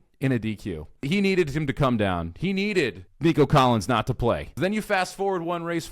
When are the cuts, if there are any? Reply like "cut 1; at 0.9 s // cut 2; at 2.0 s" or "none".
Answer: cut 1; at 1.0 s // cut 2; at 3.0 s // cut 3; at 4.5 s